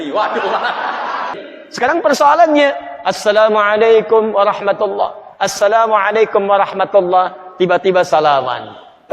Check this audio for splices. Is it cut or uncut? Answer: cut